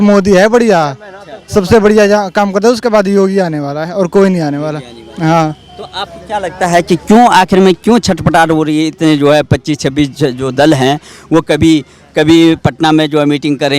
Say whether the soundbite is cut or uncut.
uncut